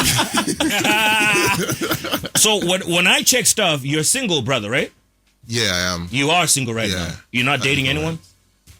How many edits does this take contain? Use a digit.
1